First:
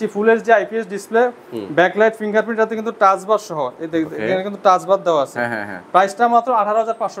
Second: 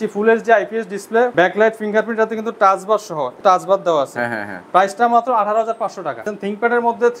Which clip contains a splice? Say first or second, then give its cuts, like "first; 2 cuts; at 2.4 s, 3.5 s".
second; 3 cuts; at 1.3 s, 3.3 s, 6.3 s